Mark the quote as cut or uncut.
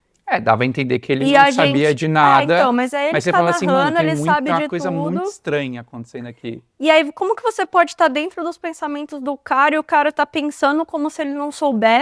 uncut